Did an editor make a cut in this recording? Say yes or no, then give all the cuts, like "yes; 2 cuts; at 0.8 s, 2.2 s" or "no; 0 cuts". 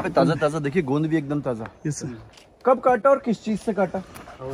no; 0 cuts